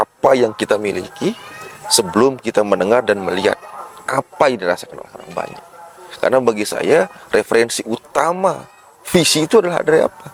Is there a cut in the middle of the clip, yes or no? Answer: no